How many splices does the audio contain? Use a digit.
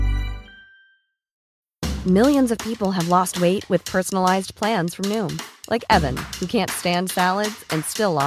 1